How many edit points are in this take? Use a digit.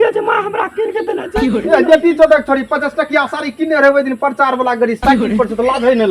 1